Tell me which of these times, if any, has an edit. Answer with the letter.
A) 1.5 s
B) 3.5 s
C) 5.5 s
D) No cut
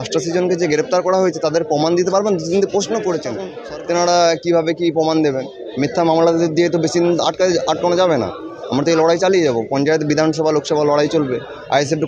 B